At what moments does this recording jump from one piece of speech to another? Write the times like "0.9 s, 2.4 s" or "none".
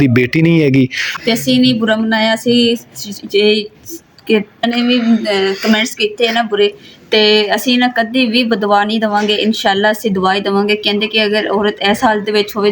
1.1 s, 4.6 s